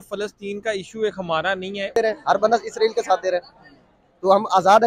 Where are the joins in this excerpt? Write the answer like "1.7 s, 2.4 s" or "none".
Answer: 2.0 s